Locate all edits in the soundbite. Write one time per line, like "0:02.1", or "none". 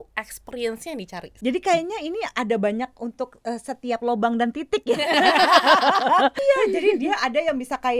0:01.3
0:06.4